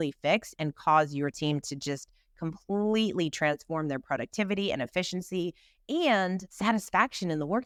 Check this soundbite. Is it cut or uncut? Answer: uncut